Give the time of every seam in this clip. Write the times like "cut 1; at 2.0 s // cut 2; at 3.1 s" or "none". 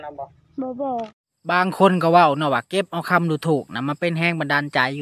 cut 1; at 1.1 s